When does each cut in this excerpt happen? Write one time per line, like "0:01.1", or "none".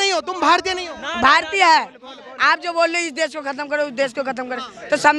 none